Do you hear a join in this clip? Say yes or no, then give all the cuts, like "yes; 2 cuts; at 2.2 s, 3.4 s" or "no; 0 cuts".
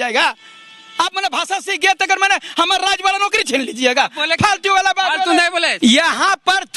yes; 1 cut; at 5.7 s